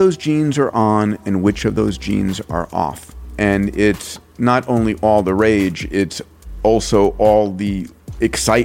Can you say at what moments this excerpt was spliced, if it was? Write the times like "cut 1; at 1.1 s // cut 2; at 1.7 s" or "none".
cut 1; at 3.2 s

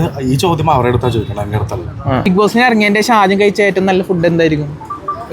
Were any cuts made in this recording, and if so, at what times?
cut 1; at 2.3 s

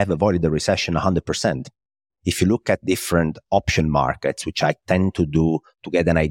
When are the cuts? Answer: none

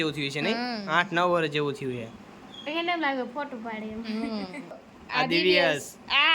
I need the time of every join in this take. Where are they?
cut 1; at 4.7 s

